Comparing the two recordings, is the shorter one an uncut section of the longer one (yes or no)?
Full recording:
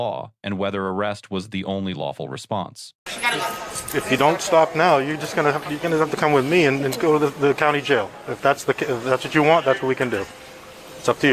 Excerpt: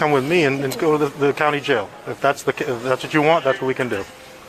yes